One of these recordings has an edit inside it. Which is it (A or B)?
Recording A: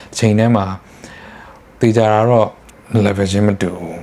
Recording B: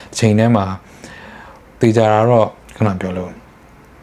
A